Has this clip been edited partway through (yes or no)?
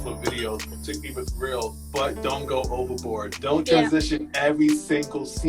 yes